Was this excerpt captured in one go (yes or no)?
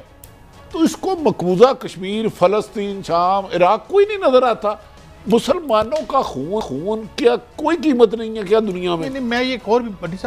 yes